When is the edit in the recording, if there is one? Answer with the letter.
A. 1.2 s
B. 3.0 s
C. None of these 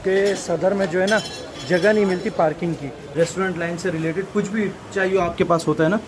B